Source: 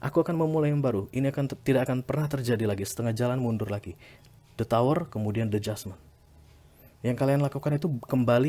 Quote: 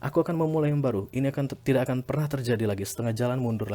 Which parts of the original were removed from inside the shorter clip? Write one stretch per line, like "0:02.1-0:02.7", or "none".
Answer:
none